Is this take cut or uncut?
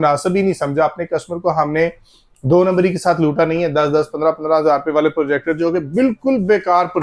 uncut